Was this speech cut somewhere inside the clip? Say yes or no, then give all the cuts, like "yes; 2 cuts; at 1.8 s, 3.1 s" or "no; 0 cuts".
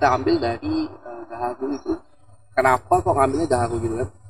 no; 0 cuts